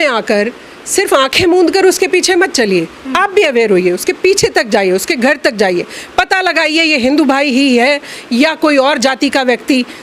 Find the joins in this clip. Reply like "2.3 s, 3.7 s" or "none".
none